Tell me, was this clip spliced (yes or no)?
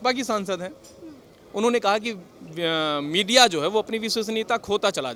no